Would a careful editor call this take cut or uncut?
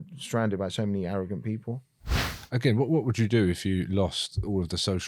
cut